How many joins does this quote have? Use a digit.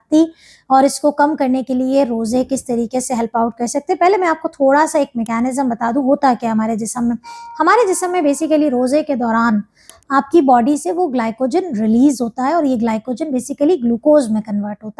1